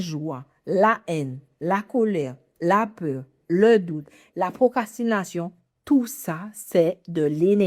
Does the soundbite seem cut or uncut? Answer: uncut